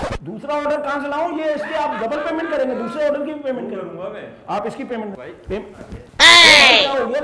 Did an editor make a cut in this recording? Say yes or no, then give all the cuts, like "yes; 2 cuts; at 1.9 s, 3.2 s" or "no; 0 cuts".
no; 0 cuts